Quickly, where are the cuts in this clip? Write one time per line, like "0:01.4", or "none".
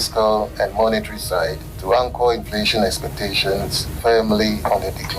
0:01.7
0:03.8